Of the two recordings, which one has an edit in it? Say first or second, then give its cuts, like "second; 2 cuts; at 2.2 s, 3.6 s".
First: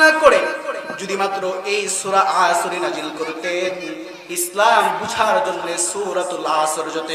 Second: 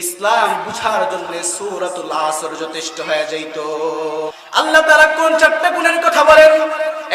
second; 1 cut; at 4.3 s